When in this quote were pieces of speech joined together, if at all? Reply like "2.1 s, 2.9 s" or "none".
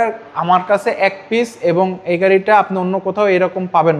none